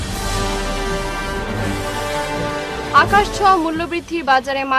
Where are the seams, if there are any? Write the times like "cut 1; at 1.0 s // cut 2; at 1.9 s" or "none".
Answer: none